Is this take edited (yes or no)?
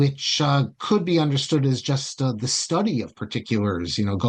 no